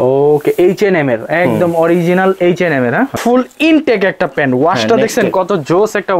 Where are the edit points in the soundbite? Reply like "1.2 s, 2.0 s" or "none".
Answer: 3.2 s